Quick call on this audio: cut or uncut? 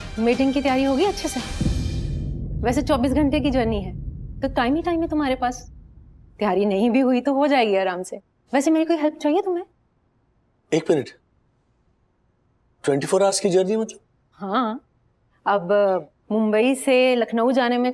uncut